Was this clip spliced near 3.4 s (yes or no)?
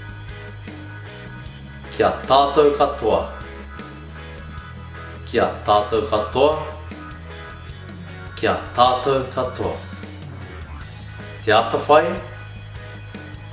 no